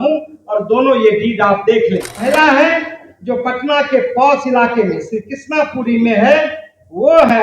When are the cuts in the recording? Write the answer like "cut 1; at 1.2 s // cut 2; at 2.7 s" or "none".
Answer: cut 1; at 2.3 s

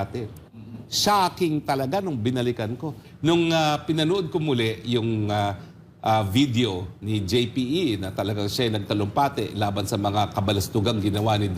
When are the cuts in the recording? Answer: cut 1; at 3.0 s

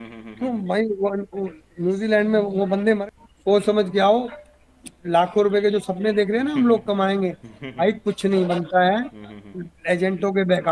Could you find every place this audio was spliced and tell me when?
cut 1; at 3.0 s

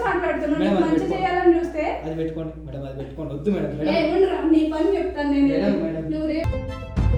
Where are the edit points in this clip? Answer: none

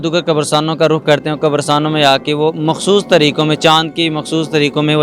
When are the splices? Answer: none

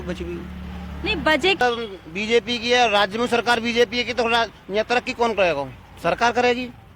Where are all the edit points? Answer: cut 1; at 1.6 s

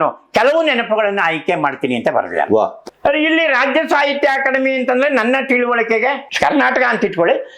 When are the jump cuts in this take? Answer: cut 1; at 2.8 s

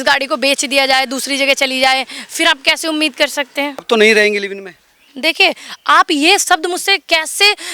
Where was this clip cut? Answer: cut 1; at 3.8 s

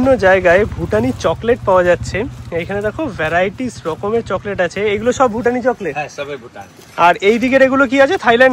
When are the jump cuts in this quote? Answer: none

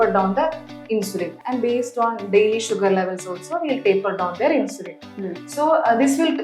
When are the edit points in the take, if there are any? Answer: none

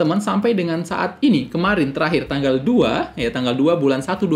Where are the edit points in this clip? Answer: none

